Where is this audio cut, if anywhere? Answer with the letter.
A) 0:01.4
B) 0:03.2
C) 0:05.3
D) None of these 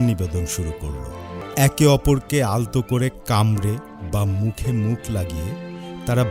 A